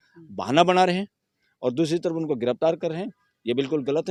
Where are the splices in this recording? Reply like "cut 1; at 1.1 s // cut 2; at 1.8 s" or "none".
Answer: none